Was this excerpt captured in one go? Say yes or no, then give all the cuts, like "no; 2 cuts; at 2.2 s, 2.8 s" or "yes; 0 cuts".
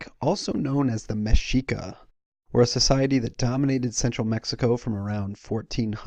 yes; 0 cuts